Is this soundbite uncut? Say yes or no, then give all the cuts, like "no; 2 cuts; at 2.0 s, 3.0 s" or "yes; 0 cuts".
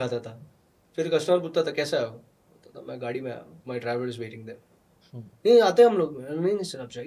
no; 1 cut; at 3.5 s